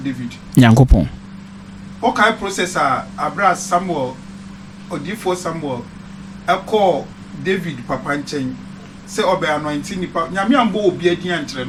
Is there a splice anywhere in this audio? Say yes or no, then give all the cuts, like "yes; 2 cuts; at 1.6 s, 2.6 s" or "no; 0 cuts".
no; 0 cuts